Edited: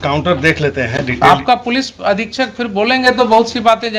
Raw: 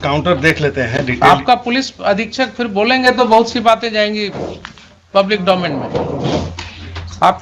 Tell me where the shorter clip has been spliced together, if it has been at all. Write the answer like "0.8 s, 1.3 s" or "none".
none